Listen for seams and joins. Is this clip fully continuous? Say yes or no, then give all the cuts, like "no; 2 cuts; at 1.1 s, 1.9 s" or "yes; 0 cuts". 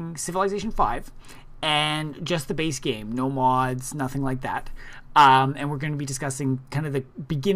no; 1 cut; at 5.3 s